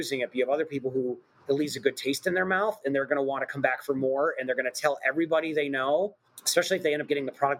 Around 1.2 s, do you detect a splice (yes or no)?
no